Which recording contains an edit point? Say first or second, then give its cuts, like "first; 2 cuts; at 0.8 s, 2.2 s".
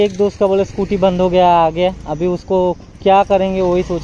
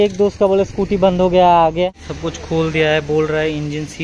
second; 1 cut; at 2.0 s